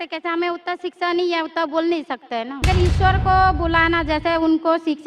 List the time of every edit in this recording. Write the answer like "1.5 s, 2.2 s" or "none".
2.6 s